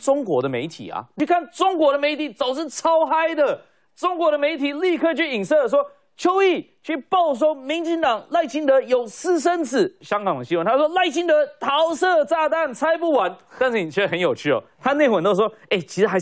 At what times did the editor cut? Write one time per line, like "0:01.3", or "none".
0:01.1
0:10.0